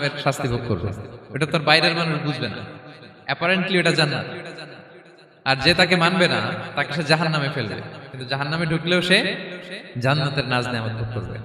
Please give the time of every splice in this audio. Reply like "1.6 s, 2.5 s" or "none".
none